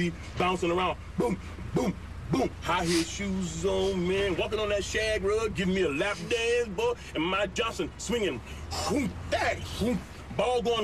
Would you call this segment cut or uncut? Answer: uncut